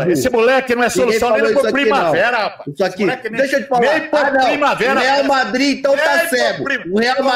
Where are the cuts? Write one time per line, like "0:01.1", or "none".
none